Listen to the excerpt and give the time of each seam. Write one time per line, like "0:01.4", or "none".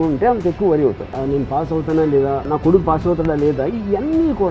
0:01.2
0:02.4